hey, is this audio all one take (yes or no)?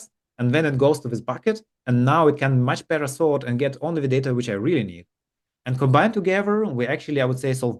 yes